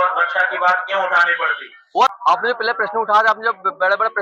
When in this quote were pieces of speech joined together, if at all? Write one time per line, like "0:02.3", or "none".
0:02.1

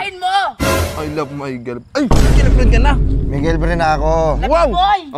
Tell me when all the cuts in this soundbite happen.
none

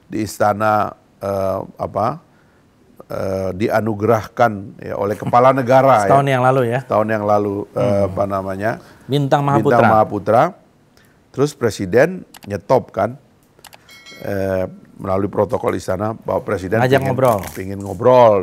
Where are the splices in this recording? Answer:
none

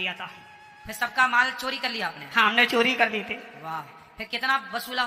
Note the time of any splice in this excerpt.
none

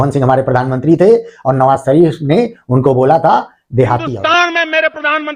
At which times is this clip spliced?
none

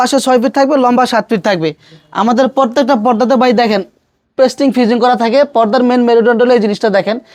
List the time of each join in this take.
none

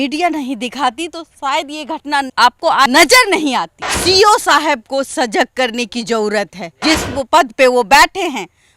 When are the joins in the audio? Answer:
0:02.4
0:03.8

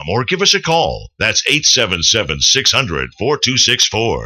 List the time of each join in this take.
0:01.0

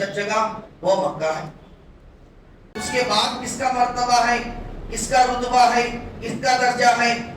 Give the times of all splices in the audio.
0:02.7

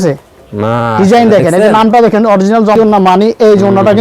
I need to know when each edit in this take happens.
0:02.8

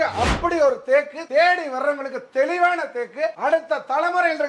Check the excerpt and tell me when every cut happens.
none

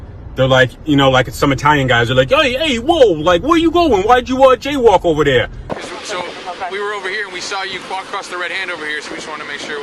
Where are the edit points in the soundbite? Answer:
none

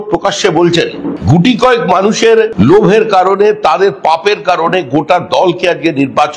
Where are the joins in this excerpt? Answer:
0:01.1
0:02.5

